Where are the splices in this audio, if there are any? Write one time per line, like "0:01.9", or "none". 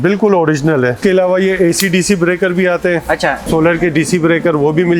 0:01.0
0:03.4